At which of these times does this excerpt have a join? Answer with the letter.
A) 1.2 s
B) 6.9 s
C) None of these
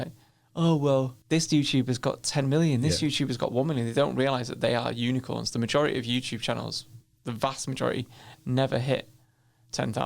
A